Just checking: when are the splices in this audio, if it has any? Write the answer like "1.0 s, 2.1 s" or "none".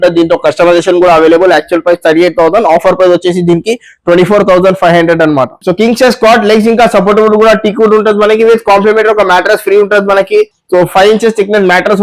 5.6 s

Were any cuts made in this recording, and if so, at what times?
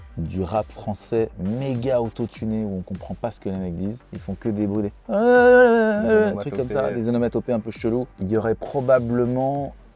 none

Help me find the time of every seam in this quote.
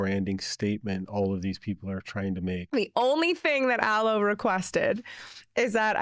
2.6 s

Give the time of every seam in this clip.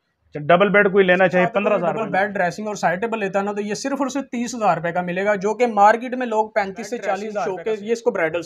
1.9 s, 7.4 s

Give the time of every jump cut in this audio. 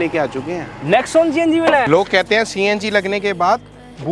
1.9 s

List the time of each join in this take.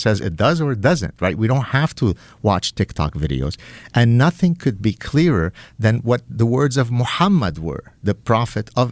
none

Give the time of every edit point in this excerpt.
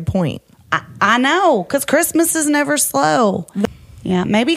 3.6 s

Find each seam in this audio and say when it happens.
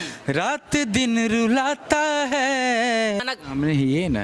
3.2 s

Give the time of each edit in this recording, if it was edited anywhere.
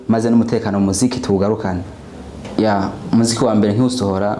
2.4 s

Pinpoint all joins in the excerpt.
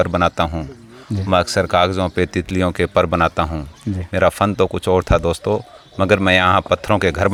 none

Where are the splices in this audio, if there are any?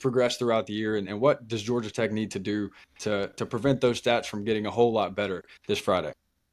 none

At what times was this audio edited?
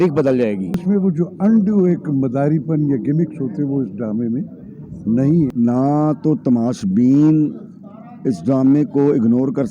0.8 s, 5.5 s

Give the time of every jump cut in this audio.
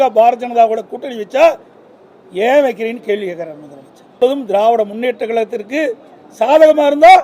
4.2 s

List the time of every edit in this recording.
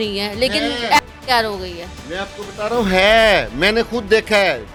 none

